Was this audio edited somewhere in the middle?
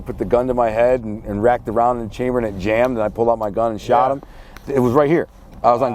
no; 0 cuts

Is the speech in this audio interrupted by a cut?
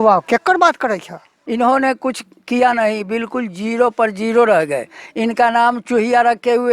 yes; 1 cut; at 1.3 s

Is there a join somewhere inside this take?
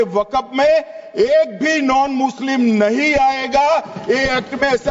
no; 0 cuts

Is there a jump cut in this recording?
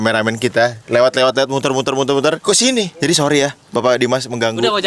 no; 0 cuts

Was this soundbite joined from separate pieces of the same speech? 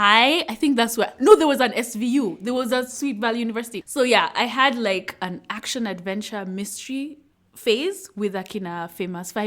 no; 0 cuts

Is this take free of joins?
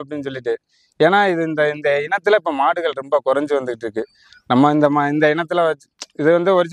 yes; 0 cuts

